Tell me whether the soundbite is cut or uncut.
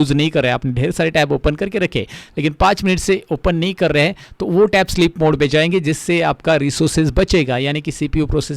uncut